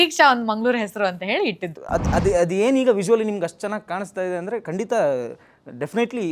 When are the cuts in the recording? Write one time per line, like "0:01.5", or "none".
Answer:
0:01.7